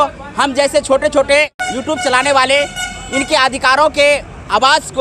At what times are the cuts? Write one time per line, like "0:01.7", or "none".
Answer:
0:01.6